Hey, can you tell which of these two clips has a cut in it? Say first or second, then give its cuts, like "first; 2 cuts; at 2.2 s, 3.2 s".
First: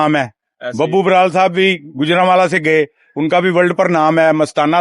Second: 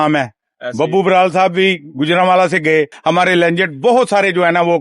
second; 1 cut; at 2.9 s